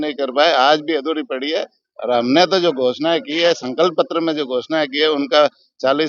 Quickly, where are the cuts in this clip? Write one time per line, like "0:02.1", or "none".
none